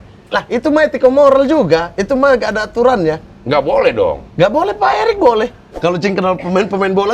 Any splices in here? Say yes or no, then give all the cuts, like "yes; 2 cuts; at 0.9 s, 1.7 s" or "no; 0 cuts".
yes; 1 cut; at 5.6 s